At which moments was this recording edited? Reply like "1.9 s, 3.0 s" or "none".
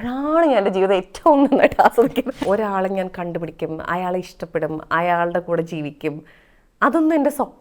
2.3 s

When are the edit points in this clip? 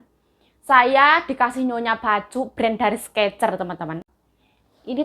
4.0 s

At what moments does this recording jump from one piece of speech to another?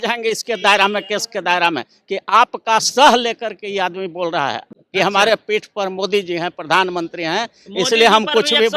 none

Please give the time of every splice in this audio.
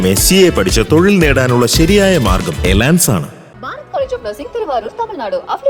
none

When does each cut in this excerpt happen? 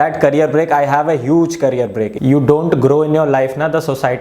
2.1 s

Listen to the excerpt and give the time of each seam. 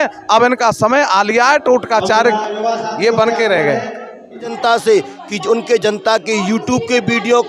4.4 s

